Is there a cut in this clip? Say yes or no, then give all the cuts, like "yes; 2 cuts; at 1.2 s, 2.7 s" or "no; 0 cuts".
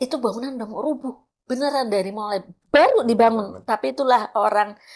no; 0 cuts